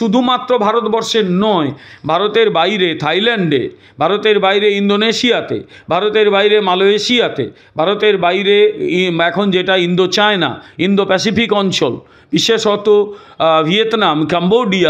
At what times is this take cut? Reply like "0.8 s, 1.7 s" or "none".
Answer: none